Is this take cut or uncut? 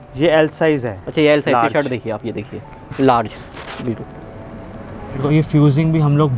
cut